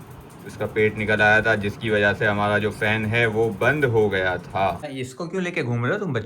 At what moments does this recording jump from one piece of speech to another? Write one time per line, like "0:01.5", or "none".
0:04.9